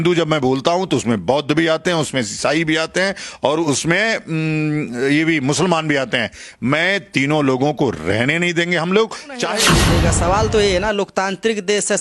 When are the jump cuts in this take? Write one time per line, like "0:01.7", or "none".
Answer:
0:09.6